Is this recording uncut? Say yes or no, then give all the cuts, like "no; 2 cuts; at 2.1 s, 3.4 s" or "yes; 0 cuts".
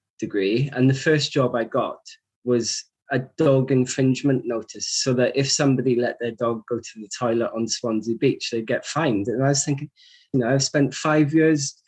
no; 1 cut; at 10.2 s